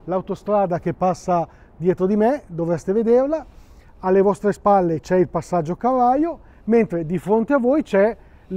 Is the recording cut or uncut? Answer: uncut